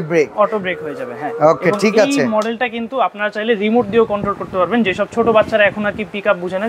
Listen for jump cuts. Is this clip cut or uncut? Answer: uncut